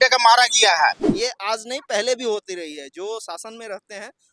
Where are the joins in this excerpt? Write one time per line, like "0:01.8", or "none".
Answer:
0:01.1